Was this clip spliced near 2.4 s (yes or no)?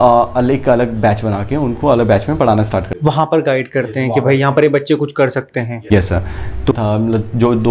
no